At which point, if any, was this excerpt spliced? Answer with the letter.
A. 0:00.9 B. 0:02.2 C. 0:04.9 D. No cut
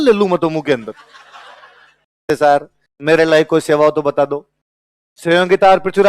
B